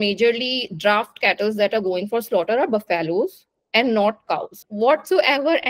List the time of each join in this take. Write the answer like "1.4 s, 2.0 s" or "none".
4.5 s

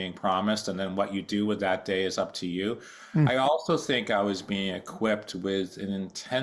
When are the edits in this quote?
none

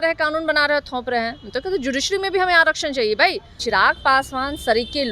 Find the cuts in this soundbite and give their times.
3.6 s

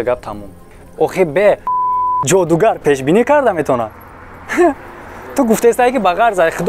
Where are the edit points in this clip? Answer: 2.2 s

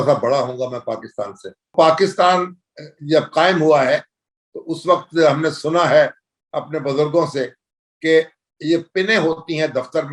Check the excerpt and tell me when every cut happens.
1.7 s

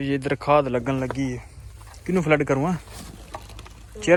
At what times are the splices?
none

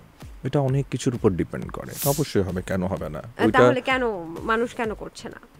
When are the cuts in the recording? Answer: 1.8 s

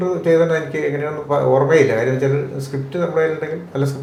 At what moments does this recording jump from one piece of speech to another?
none

